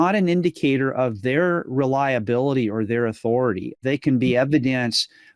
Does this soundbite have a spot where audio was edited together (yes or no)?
yes